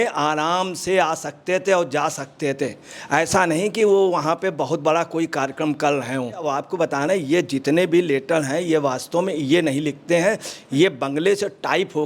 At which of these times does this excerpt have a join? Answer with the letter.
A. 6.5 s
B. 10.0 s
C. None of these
A